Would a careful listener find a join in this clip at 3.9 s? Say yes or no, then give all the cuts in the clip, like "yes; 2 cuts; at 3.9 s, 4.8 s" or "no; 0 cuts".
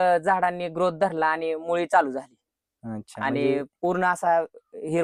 no; 0 cuts